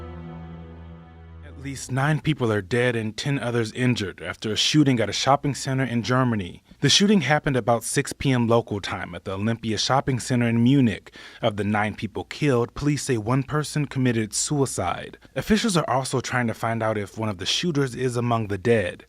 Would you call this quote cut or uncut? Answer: cut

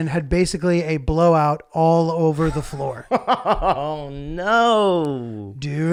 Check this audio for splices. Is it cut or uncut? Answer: uncut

